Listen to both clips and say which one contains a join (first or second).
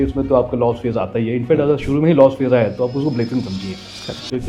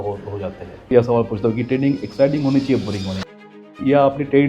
second